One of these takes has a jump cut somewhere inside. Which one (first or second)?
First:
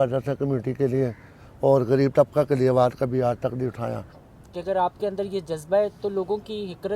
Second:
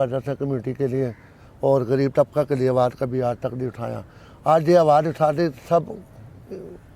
first